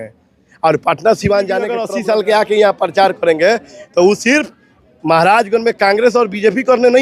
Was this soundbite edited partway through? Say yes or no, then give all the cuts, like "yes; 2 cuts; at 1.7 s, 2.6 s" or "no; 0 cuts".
yes; 1 cut; at 1.9 s